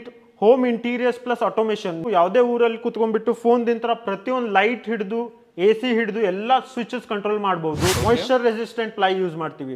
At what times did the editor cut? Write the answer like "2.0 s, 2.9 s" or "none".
2.0 s, 8.0 s